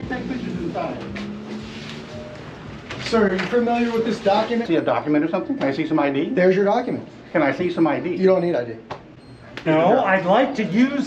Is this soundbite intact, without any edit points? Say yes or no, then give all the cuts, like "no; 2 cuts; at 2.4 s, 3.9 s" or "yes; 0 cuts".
no; 2 cuts; at 4.7 s, 9.6 s